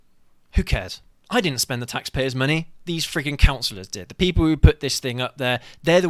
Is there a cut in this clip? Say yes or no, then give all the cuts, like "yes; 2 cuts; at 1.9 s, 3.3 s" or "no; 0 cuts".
no; 0 cuts